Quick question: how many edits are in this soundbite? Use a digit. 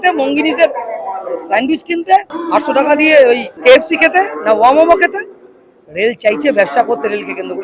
2